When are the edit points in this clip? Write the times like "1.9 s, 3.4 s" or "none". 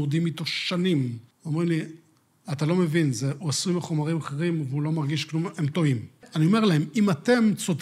1.3 s, 6.2 s